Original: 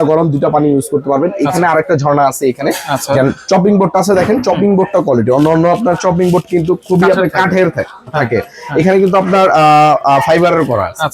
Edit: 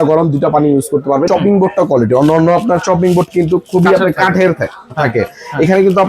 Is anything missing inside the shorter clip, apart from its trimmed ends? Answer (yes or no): yes